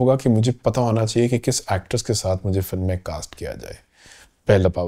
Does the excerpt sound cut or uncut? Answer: uncut